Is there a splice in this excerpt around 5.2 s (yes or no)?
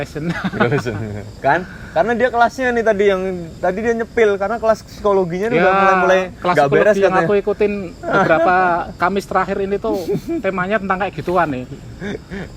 no